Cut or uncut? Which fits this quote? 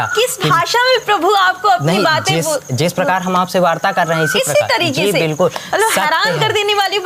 uncut